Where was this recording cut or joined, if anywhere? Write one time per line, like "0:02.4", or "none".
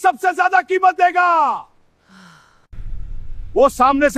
0:02.7